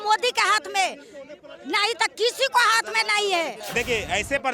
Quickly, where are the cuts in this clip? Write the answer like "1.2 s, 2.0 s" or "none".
3.6 s